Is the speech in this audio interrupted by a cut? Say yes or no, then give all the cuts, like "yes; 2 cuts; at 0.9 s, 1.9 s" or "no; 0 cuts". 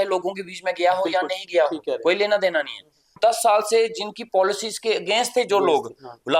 yes; 1 cut; at 3.2 s